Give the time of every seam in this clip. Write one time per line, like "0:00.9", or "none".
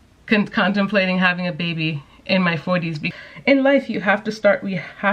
0:03.1